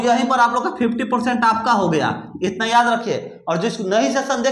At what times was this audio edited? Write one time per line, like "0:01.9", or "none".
none